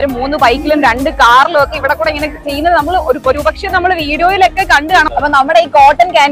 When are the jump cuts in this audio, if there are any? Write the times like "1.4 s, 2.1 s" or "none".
5.1 s